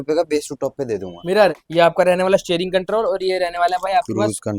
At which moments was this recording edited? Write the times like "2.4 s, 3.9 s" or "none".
1.6 s

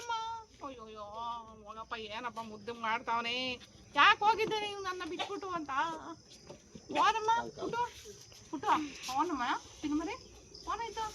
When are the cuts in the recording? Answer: none

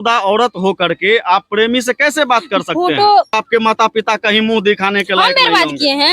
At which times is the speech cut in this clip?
3.3 s

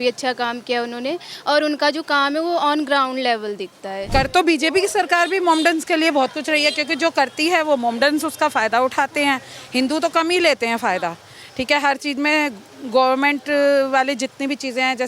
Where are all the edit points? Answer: 4.0 s

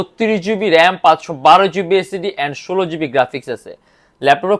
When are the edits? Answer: none

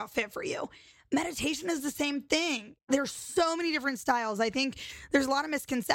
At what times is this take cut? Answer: 2.8 s

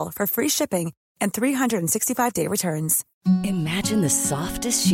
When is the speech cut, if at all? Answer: 3.0 s

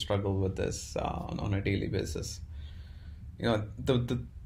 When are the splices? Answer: none

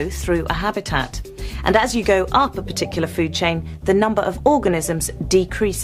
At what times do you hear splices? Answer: 4.4 s

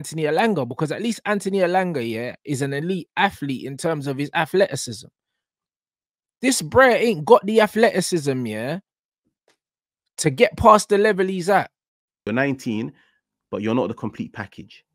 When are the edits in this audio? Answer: 12.1 s

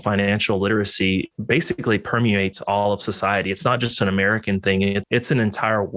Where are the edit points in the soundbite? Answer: 1.3 s, 5.0 s

